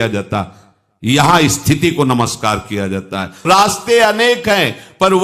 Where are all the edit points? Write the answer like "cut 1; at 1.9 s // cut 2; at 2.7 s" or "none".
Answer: cut 1; at 3.5 s